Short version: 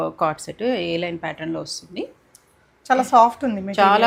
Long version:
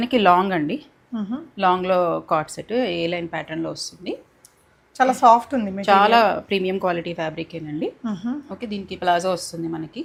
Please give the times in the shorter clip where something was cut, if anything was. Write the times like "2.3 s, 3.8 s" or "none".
none